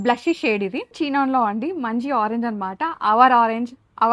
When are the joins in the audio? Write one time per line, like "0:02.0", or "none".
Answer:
0:00.9